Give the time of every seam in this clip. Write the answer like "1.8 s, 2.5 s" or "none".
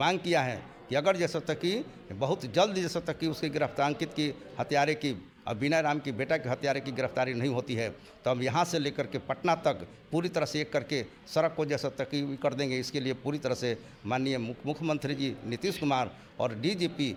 none